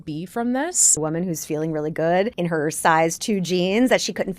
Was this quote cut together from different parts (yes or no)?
yes